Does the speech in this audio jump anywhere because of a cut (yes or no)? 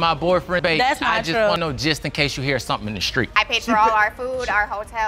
yes